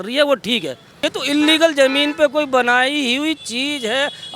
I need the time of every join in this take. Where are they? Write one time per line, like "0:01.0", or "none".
none